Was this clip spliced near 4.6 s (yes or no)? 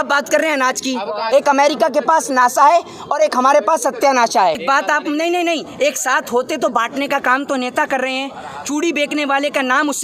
yes